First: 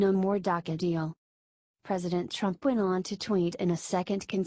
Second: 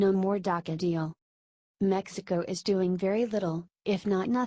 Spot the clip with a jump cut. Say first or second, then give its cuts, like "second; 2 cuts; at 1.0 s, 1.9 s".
second; 1 cut; at 1.9 s